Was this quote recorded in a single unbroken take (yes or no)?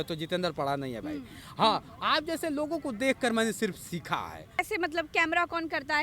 no